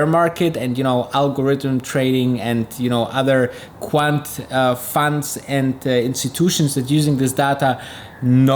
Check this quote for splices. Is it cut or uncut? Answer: uncut